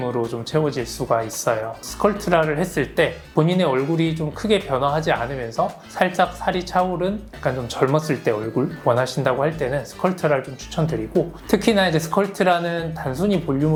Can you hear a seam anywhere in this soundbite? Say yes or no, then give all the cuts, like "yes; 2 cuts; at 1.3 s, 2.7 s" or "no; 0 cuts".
no; 0 cuts